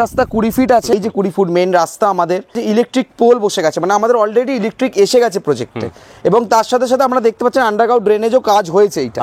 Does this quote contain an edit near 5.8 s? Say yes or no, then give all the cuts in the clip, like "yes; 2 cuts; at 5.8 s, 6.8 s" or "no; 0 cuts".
no; 2 cuts; at 0.9 s, 2.6 s